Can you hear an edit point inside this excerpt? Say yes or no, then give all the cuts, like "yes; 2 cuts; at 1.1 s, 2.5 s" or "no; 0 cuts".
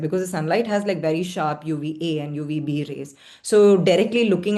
no; 0 cuts